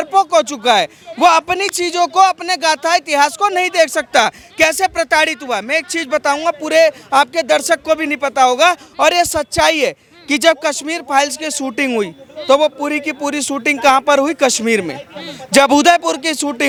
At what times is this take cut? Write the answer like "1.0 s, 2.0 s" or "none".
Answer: none